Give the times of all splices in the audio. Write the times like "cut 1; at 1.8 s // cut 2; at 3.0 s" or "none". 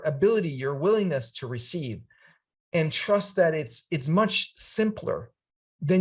none

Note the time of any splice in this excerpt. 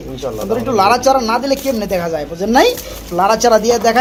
none

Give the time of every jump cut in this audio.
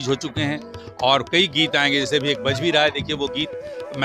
none

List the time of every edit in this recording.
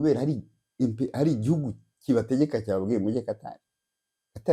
none

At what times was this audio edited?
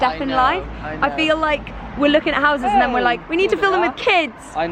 none

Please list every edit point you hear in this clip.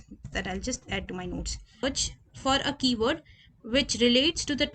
cut 1; at 1.8 s

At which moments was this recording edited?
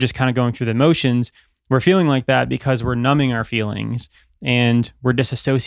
none

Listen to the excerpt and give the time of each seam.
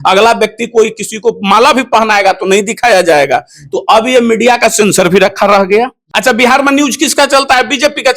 cut 1; at 6.0 s

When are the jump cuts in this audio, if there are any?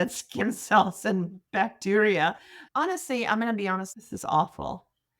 cut 1; at 3.9 s

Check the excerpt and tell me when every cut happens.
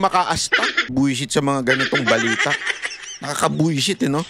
cut 1; at 0.9 s

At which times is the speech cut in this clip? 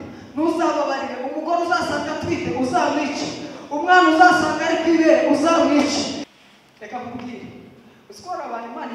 cut 1; at 6.2 s

